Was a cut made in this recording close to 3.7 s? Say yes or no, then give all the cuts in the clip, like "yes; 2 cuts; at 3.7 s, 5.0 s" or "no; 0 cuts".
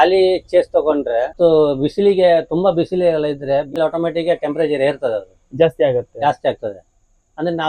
yes; 2 cuts; at 1.3 s, 3.7 s